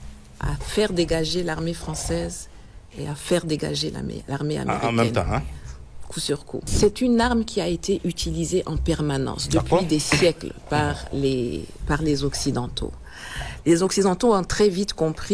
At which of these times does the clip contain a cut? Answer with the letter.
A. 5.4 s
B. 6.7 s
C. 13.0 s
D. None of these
B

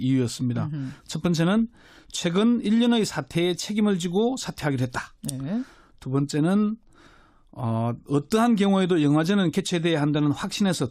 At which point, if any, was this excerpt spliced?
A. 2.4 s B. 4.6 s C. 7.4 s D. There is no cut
B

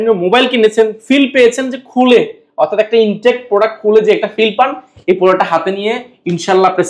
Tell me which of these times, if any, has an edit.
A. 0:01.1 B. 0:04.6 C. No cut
C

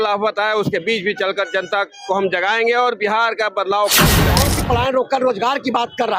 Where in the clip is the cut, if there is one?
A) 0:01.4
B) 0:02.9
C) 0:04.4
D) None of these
C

